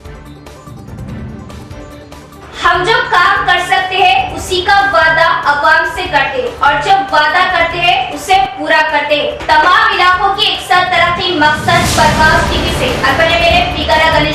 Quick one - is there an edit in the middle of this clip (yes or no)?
yes